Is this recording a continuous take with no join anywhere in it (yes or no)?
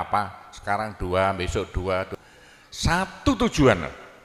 no